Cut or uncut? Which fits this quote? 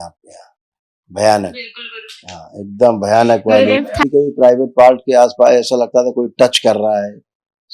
cut